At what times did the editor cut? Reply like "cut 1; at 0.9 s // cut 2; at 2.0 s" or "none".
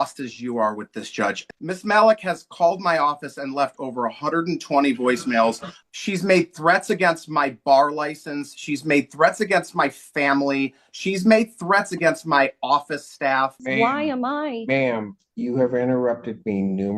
cut 1; at 1.4 s // cut 2; at 5.7 s // cut 3; at 13.6 s